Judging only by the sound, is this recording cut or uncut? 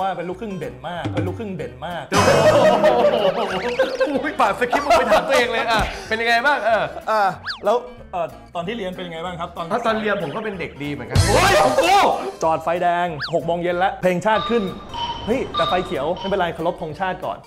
cut